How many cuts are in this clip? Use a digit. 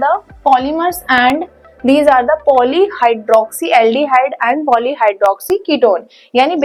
0